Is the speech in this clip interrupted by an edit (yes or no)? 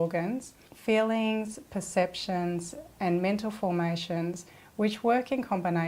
no